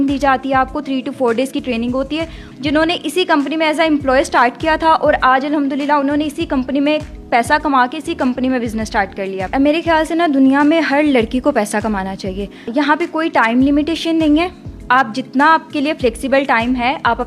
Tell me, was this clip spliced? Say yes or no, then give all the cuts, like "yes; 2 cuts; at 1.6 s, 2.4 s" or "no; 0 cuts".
yes; 3 cuts; at 2.4 s, 9.5 s, 12.7 s